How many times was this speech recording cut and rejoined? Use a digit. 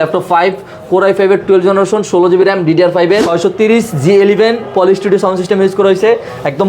1